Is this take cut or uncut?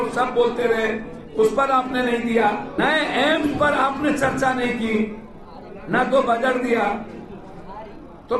cut